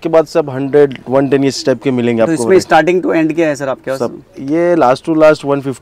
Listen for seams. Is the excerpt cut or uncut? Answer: uncut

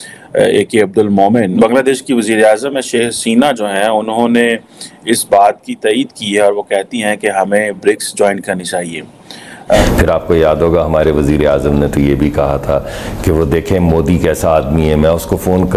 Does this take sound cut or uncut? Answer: cut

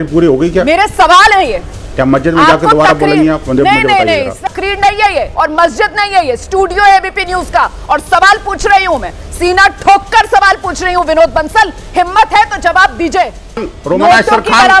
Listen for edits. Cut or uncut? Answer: cut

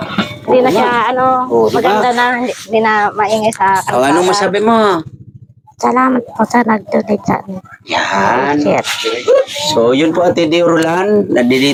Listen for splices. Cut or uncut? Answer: uncut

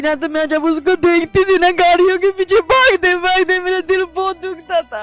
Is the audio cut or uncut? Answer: uncut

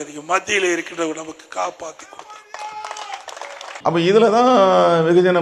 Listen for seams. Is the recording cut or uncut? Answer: uncut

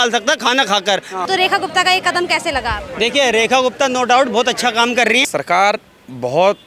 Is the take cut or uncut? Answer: cut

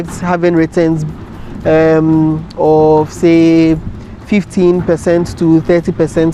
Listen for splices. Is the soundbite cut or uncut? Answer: uncut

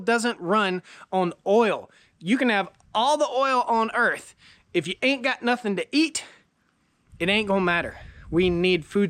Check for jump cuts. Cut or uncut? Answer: uncut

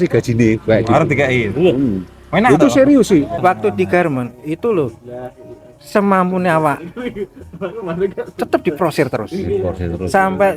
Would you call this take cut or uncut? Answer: cut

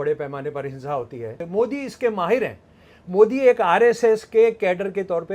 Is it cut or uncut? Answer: cut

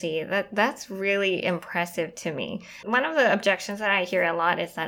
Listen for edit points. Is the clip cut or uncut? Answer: cut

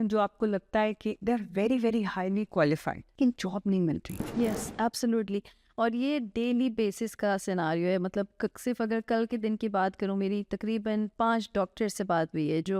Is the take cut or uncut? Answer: cut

